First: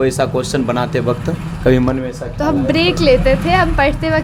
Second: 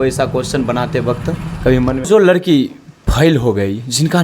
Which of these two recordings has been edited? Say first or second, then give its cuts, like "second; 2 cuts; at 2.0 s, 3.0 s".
second; 1 cut; at 2.1 s